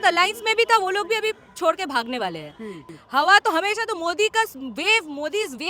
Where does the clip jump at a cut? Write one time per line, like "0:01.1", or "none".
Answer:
0:02.8